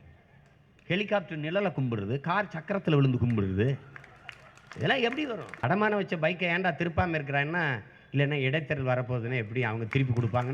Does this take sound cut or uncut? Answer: cut